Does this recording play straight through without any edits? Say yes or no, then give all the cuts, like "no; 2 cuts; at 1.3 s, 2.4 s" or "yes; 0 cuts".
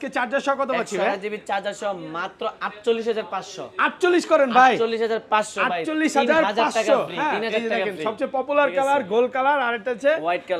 yes; 0 cuts